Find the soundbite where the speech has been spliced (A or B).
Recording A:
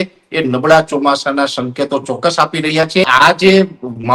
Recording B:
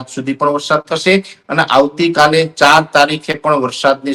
A